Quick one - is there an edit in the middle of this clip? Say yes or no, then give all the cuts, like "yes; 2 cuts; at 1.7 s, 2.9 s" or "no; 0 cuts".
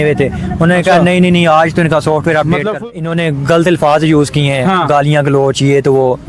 yes; 1 cut; at 2.8 s